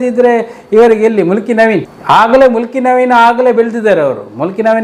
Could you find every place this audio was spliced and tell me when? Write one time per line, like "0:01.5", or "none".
none